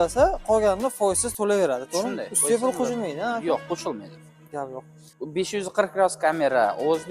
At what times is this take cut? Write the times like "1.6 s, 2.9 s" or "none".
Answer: 5.0 s